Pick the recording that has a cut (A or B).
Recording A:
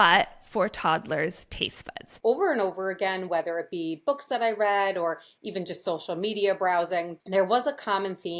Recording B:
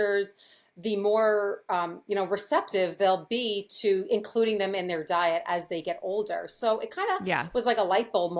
A